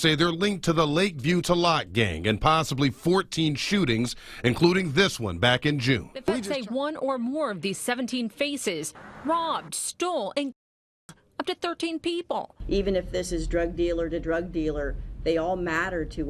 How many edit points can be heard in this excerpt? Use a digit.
1